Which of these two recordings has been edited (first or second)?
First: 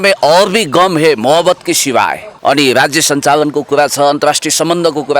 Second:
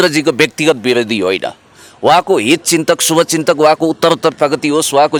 first